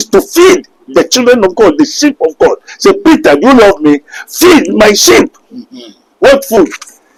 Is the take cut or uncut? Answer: uncut